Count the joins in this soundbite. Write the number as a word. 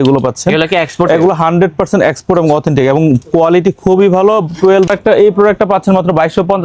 one